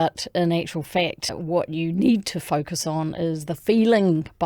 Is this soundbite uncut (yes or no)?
no